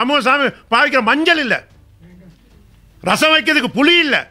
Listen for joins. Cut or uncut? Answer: uncut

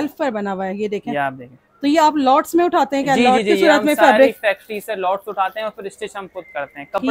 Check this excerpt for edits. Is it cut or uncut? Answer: uncut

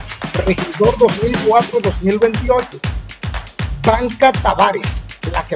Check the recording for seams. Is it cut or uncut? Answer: uncut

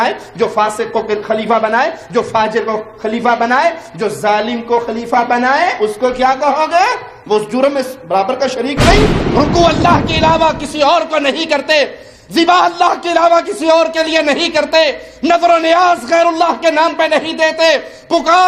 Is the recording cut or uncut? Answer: cut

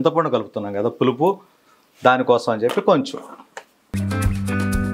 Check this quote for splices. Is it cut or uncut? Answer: cut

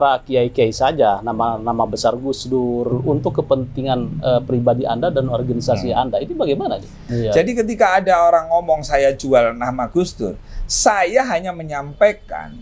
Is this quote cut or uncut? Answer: cut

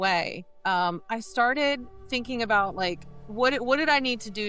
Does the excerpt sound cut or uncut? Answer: cut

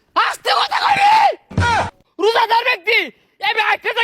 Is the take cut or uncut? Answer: cut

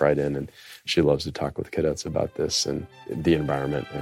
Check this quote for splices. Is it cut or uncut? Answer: cut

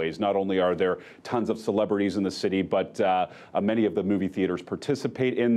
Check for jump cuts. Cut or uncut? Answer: cut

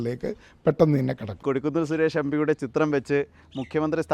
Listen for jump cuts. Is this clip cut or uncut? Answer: cut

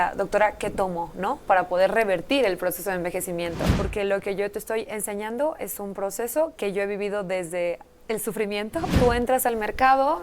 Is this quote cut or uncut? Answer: cut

